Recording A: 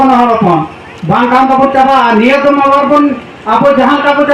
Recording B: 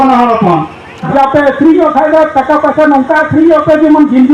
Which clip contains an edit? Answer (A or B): B